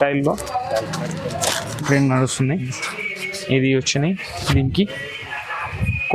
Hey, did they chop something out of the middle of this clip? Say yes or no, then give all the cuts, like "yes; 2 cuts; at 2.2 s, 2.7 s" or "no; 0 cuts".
yes; 1 cut; at 1.8 s